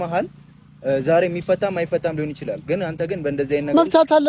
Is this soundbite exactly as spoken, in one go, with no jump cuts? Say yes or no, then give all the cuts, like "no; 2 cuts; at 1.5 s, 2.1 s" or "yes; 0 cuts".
yes; 0 cuts